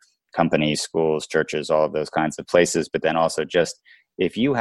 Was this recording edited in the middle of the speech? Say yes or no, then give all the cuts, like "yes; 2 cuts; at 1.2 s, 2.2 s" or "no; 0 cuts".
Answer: no; 0 cuts